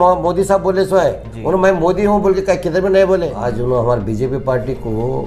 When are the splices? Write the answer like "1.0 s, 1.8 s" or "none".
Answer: 3.4 s